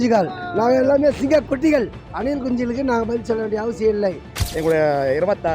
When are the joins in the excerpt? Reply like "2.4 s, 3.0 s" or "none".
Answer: 2.0 s, 4.4 s